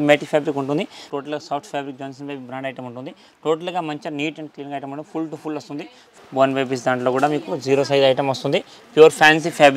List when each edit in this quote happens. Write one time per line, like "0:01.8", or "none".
0:01.0
0:06.1